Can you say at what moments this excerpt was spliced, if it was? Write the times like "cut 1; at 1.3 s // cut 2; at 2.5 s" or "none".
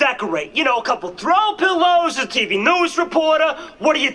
none